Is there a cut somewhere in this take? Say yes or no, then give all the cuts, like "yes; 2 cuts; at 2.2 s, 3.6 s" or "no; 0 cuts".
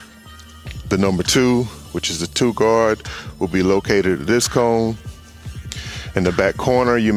no; 0 cuts